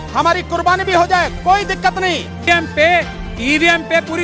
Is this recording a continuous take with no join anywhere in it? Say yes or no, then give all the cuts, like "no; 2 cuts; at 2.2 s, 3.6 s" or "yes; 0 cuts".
no; 1 cut; at 2.5 s